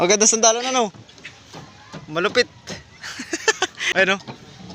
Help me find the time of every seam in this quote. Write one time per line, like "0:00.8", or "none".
0:03.8